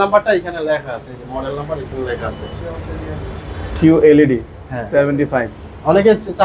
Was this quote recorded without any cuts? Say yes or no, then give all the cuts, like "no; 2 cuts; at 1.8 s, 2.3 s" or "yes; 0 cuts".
yes; 0 cuts